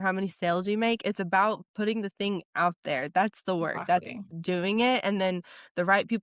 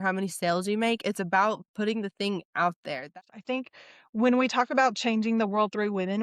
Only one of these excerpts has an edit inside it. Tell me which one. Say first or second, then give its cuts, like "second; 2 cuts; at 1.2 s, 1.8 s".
second; 1 cut; at 3.1 s